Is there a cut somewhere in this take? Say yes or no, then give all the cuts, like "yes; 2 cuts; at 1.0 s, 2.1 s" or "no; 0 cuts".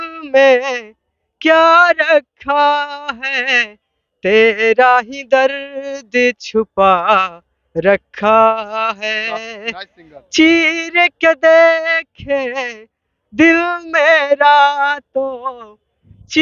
no; 0 cuts